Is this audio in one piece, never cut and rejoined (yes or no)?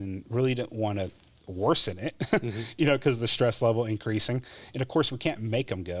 yes